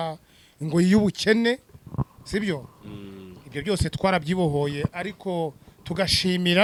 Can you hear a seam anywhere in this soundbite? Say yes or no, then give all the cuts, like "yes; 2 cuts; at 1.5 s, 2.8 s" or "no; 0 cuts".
no; 0 cuts